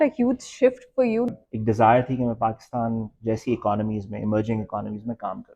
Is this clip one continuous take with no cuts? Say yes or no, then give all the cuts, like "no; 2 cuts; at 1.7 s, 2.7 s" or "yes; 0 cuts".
no; 1 cut; at 1.3 s